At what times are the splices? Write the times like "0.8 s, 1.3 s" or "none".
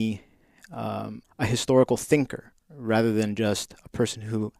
1.2 s